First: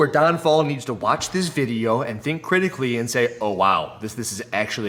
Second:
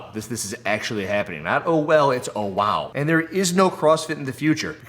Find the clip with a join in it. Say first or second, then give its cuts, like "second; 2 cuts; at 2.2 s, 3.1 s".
second; 1 cut; at 2.9 s